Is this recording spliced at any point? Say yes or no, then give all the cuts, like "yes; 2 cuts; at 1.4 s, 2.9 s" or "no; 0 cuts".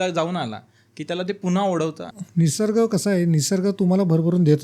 no; 0 cuts